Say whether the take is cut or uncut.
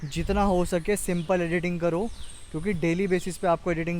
uncut